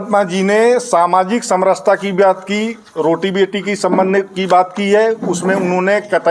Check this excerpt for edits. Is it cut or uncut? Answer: uncut